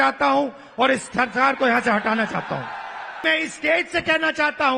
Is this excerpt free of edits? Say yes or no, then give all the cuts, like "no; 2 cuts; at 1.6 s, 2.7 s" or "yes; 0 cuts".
no; 1 cut; at 3.2 s